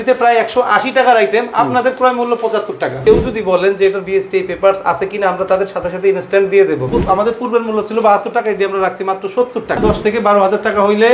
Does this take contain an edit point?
yes; 3 cuts; at 3.0 s, 6.9 s, 9.8 s

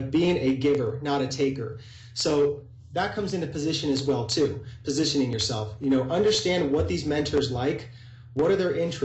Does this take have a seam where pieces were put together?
no; 0 cuts

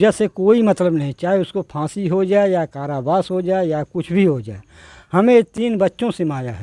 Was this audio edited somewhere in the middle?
no; 0 cuts

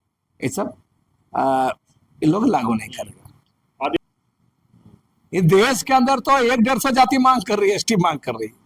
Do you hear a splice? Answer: yes; 1 cut; at 4.0 s

